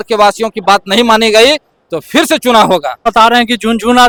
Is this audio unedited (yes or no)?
yes